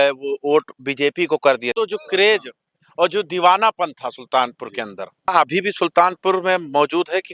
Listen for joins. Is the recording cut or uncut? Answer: cut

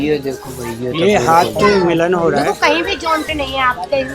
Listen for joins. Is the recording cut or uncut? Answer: uncut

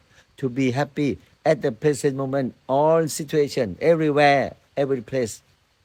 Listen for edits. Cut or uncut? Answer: uncut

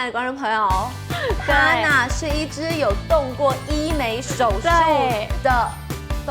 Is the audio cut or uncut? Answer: uncut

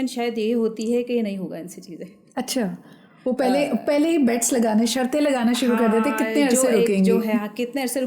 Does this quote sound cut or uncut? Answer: uncut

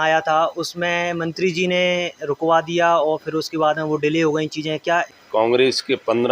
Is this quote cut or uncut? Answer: cut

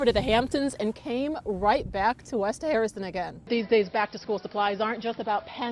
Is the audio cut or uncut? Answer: cut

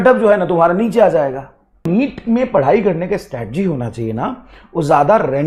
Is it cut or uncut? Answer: cut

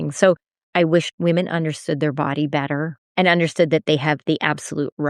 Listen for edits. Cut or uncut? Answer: cut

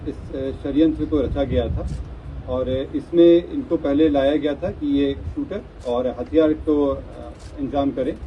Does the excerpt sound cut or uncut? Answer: uncut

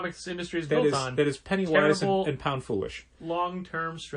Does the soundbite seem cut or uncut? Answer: uncut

